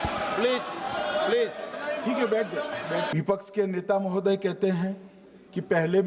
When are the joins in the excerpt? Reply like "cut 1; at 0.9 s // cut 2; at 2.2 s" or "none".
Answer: cut 1; at 3.1 s